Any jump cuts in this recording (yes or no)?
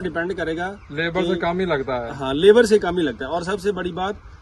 no